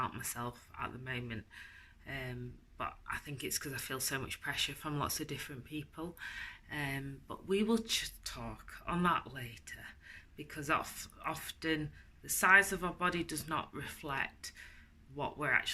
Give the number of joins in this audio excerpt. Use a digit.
0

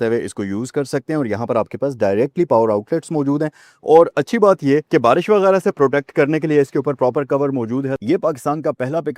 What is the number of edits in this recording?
1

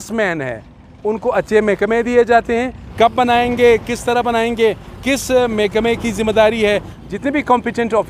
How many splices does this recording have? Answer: 2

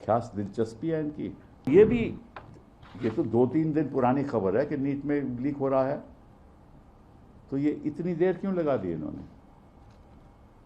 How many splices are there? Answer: 1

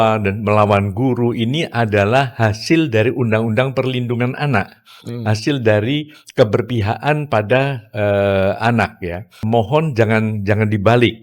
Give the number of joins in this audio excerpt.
1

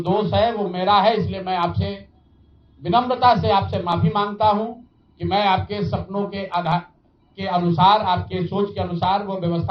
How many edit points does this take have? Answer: 0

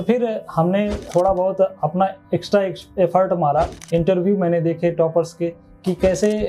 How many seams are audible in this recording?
1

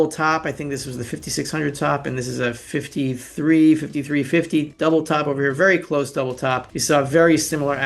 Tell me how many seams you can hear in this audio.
2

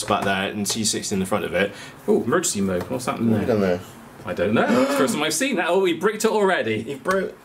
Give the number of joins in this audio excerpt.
1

